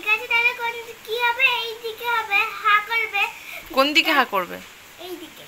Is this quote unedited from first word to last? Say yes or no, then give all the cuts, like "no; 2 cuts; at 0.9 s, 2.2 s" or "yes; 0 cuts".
yes; 0 cuts